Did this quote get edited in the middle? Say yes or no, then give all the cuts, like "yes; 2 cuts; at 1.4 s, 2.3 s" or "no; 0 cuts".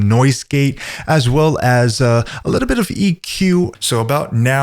yes; 1 cut; at 3.7 s